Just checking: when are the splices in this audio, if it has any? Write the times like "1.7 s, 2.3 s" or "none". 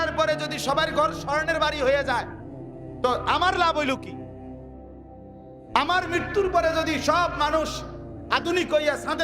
4.0 s, 5.7 s

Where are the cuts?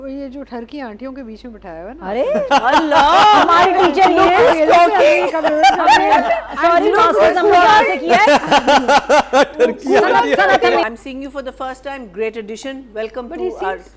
10.9 s

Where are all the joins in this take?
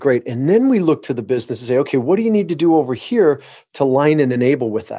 none

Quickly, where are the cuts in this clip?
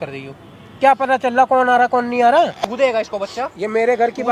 2.5 s

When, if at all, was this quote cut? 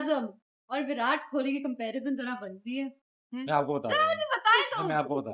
none

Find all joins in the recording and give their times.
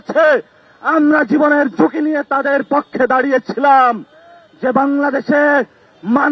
none

